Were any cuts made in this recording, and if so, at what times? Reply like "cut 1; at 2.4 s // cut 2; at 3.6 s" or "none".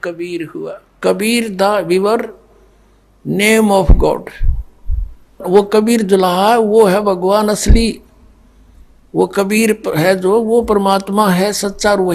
cut 1; at 0.9 s